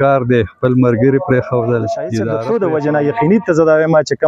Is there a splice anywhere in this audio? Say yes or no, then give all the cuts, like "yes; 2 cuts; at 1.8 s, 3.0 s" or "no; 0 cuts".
yes; 1 cut; at 2.6 s